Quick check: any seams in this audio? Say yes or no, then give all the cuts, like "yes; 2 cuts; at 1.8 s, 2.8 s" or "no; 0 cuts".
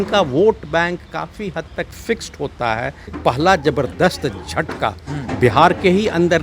yes; 1 cut; at 3.1 s